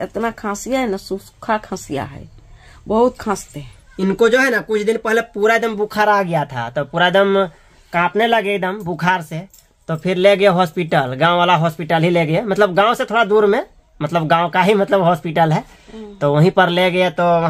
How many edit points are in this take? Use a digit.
0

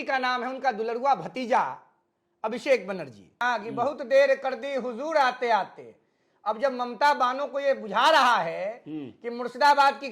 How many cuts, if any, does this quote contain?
1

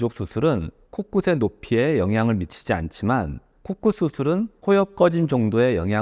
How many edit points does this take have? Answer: 0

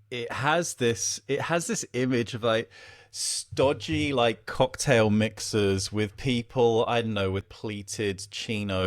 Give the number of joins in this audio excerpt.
1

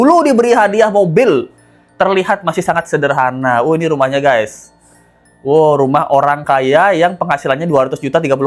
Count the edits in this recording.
0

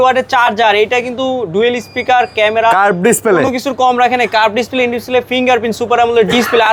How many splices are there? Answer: 0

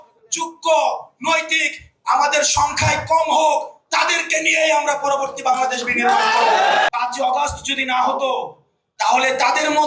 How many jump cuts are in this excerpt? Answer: 1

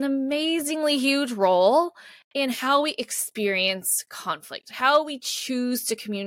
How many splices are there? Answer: 0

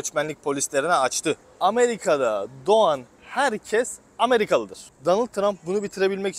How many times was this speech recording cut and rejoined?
2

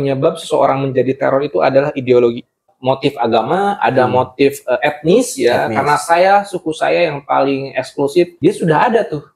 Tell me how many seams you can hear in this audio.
2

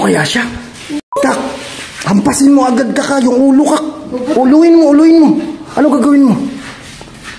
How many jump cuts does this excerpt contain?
1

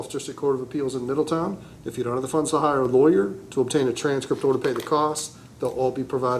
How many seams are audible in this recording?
0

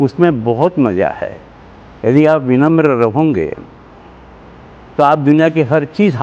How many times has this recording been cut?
0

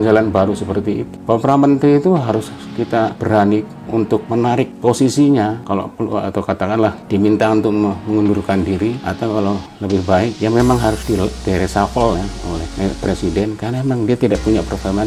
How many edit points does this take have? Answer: 9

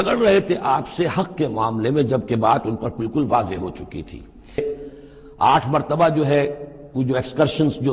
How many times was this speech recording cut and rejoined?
1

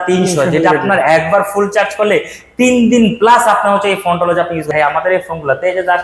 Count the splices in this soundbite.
1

